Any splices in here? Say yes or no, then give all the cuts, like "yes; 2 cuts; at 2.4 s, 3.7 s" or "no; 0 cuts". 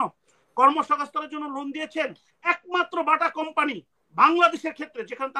yes; 1 cut; at 2.4 s